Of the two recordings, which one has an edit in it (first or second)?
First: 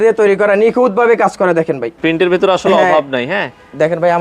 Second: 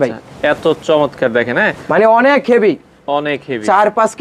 first